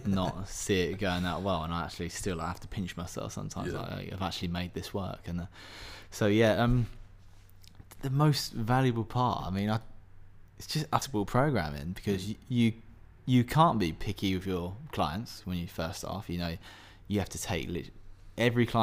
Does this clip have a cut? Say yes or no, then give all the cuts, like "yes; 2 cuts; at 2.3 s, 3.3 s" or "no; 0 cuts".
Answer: yes; 1 cut; at 11.0 s